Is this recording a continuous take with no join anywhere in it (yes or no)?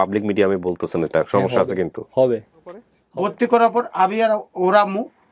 no